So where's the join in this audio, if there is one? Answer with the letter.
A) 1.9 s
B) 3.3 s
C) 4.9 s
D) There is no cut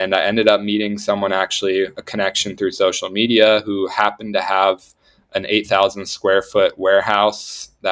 D